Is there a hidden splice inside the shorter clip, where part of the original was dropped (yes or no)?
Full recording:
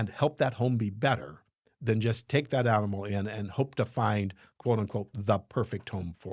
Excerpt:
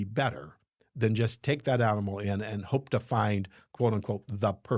no